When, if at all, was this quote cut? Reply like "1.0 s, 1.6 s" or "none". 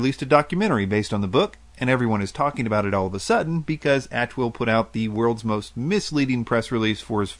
2.7 s

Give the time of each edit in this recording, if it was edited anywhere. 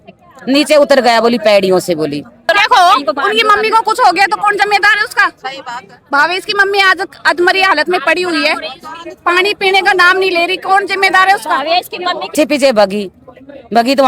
2.5 s, 12.3 s

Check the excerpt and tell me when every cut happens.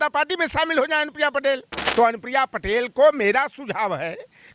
1.8 s

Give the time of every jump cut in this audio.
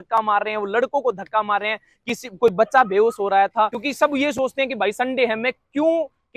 3.8 s

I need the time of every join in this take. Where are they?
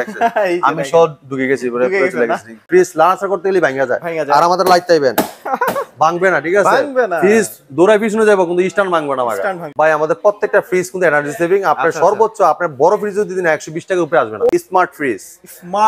2.6 s, 9.6 s, 14.5 s

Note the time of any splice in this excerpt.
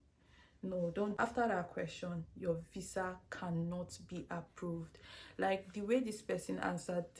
1.2 s

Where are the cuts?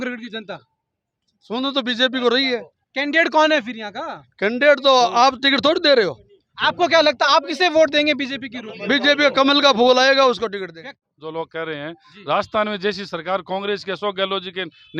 10.8 s

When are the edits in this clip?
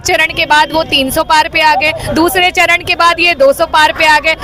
none

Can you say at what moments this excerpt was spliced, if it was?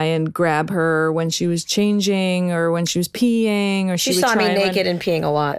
none

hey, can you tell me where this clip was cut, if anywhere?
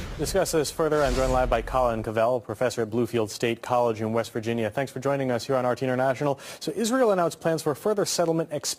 5.7 s

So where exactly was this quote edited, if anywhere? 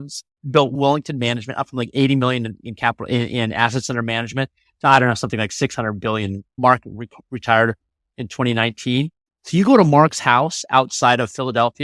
0.7 s, 6.5 s

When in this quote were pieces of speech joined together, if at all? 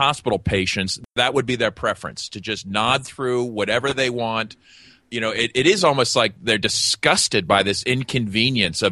none

